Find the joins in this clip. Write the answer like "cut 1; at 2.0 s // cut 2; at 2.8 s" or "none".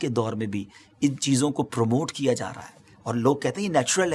none